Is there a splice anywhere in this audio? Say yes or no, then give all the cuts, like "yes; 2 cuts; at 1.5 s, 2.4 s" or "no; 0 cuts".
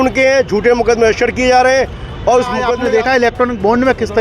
yes; 1 cut; at 3.1 s